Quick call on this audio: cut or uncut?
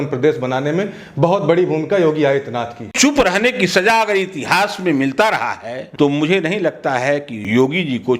cut